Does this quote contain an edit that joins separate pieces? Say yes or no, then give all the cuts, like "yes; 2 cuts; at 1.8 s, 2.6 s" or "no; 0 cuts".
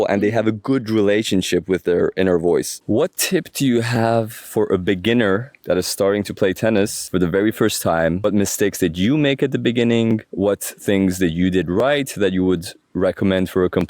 yes; 2 cuts; at 2.8 s, 8.2 s